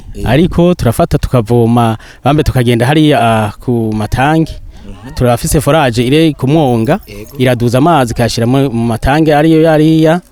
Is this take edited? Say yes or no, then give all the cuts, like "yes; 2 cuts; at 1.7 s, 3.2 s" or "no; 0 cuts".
no; 0 cuts